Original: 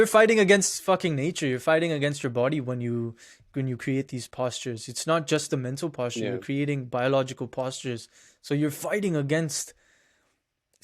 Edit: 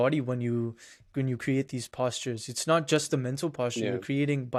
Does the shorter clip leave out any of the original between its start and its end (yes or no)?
no